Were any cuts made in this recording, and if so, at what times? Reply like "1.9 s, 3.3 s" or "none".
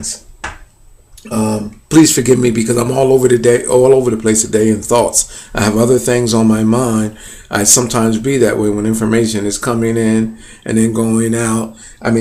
none